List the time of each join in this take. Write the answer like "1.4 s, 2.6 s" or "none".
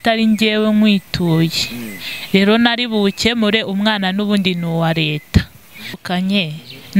5.9 s